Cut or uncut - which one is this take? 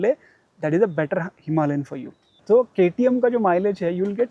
cut